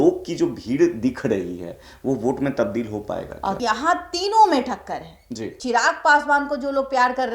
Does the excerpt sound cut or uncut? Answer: cut